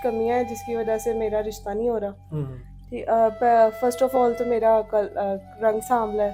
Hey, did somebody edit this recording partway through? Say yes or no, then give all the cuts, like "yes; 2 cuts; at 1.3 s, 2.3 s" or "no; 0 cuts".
no; 0 cuts